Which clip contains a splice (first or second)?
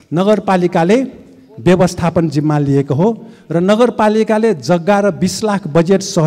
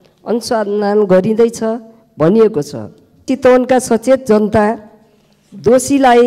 second